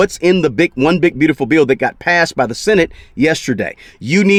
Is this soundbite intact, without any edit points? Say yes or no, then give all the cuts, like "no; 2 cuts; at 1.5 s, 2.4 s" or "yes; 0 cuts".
yes; 0 cuts